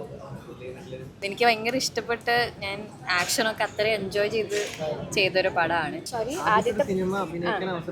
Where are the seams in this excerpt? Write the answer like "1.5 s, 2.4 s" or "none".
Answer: 1.2 s, 6.0 s